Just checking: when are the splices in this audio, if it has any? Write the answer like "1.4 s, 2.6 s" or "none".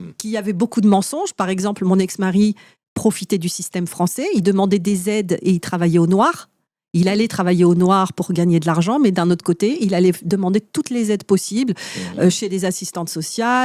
none

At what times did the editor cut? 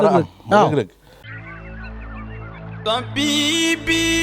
1.4 s

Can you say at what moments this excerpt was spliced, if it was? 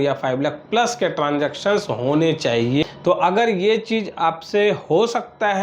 2.8 s

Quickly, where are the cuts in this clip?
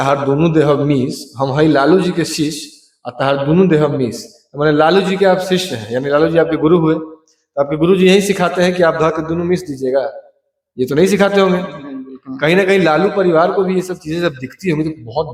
none

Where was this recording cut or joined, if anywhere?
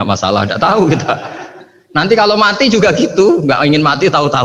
none

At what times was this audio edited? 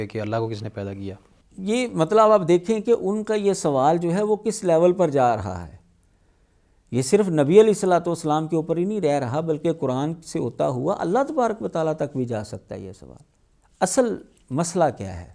none

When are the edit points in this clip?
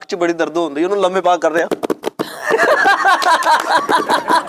none

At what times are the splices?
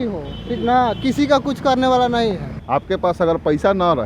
2.5 s

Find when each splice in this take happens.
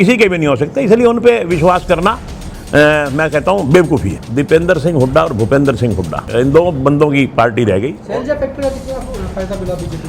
4.2 s, 6.2 s, 8.0 s

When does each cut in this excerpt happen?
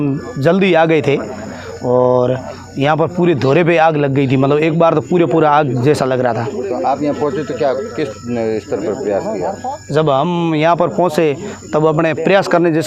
none

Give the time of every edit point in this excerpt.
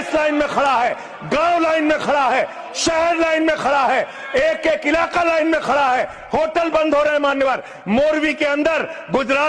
none

